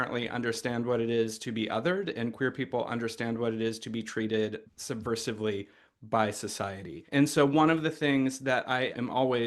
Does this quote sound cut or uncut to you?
uncut